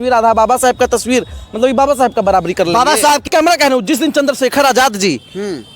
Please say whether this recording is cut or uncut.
cut